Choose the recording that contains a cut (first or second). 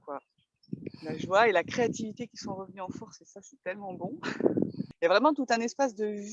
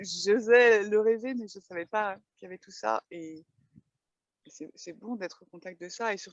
first